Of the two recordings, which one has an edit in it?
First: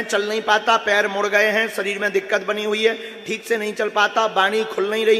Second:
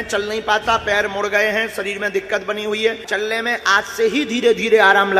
second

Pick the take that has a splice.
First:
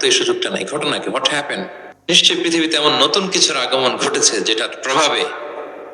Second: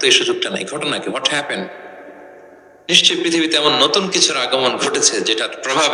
first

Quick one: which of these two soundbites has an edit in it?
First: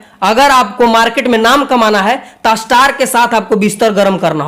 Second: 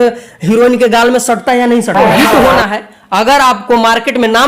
second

